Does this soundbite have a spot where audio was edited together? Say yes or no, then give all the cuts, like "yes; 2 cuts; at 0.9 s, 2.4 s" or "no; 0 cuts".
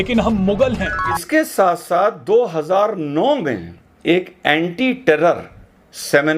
yes; 1 cut; at 1.2 s